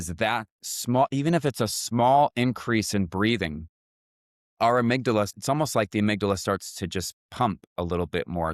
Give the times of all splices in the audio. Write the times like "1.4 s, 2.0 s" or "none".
5.3 s